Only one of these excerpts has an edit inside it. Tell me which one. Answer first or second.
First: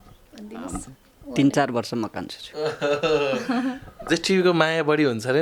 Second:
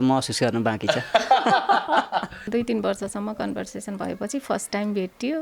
second